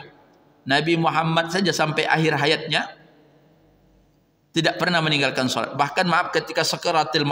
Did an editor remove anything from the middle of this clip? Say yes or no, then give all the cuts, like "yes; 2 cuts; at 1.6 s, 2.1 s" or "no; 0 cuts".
no; 0 cuts